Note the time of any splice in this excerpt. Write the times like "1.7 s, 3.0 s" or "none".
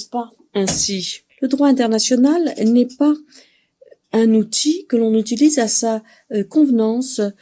1.2 s